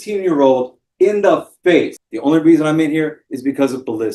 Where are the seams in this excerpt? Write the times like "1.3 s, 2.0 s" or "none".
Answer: 2.0 s